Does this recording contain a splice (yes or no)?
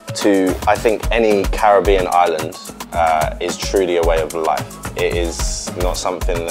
no